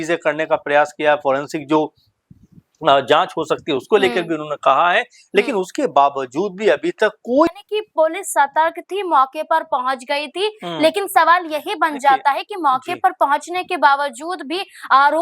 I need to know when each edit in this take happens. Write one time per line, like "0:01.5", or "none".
0:07.5